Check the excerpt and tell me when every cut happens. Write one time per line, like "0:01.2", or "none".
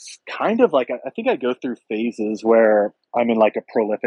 0:03.0

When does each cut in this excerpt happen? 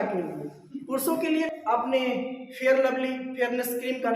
0:01.5

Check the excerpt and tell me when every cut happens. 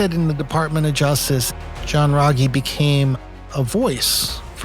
0:01.5

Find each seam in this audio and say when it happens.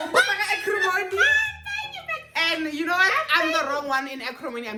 none

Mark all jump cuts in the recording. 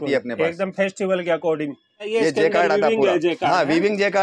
0:02.1

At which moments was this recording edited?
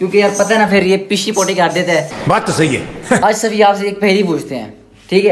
0:03.2

